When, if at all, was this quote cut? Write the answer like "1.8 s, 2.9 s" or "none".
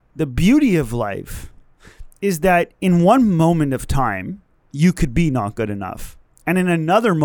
none